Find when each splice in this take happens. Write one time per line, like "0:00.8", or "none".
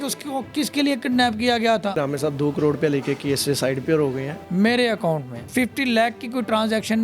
0:02.0
0:04.4
0:05.4

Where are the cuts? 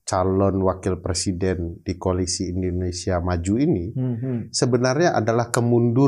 none

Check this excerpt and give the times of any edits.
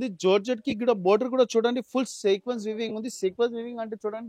none

